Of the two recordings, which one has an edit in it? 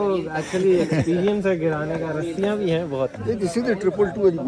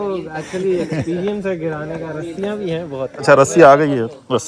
first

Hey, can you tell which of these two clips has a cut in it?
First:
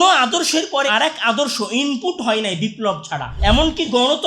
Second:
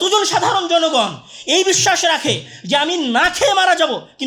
first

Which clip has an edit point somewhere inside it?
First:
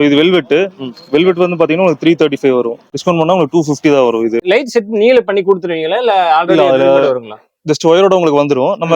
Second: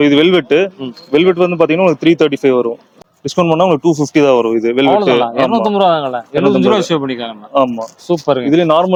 first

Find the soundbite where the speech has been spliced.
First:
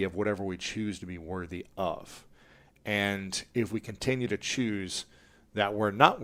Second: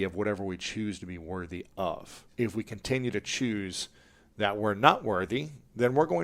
second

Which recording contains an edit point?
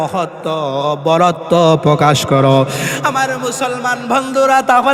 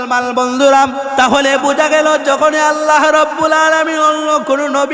second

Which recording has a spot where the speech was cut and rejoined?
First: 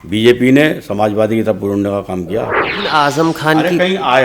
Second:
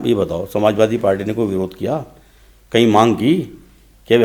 first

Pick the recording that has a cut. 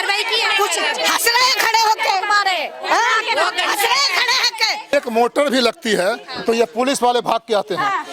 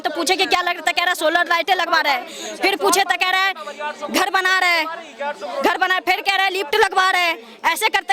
first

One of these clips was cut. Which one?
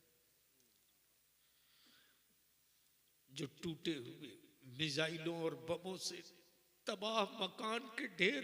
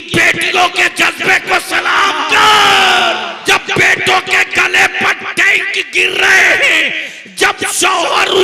second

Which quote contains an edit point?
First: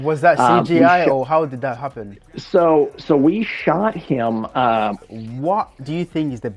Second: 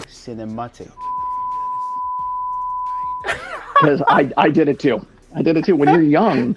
first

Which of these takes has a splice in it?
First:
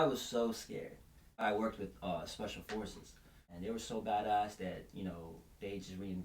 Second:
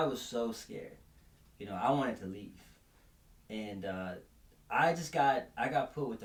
first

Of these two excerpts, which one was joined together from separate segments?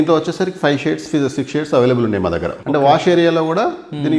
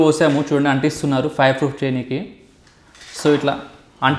first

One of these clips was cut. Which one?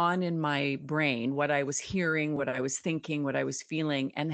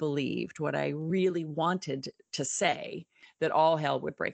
second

